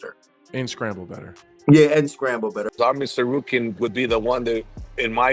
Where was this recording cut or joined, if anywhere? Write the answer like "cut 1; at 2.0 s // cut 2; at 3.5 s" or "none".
cut 1; at 2.6 s